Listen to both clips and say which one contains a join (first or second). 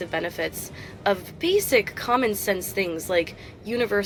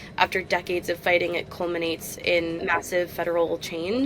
second